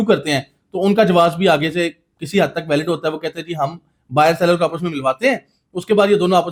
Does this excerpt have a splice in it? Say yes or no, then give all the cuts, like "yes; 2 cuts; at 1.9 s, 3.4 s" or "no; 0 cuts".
no; 0 cuts